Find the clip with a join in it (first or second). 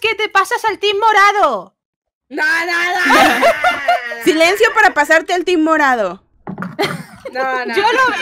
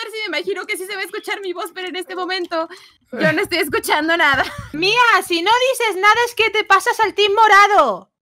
second